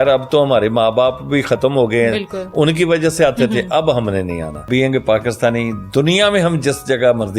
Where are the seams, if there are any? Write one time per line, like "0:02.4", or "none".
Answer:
0:04.7